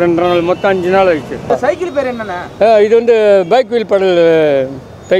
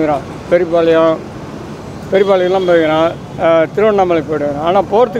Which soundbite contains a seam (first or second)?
first